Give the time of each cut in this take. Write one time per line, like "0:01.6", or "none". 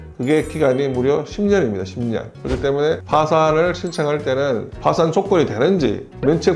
none